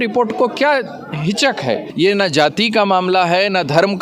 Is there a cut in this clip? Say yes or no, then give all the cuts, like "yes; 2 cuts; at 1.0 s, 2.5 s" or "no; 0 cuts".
yes; 1 cut; at 1.9 s